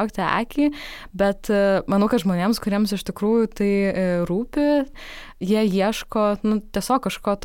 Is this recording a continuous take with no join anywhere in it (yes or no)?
no